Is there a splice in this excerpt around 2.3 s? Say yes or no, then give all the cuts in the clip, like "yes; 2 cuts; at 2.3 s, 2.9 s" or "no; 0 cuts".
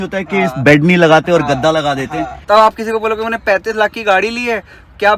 yes; 1 cut; at 2.3 s